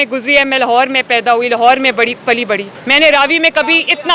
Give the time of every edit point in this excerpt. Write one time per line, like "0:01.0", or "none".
0:02.8